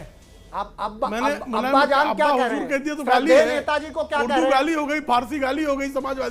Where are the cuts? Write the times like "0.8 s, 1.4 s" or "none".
none